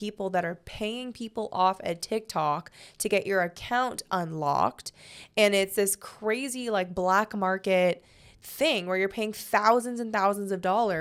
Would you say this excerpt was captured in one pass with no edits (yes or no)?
yes